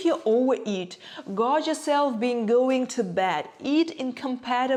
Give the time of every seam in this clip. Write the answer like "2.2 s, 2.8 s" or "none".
none